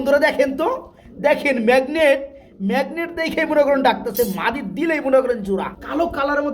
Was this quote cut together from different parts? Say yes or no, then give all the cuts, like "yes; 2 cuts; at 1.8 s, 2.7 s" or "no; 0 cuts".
yes; 1 cut; at 5.5 s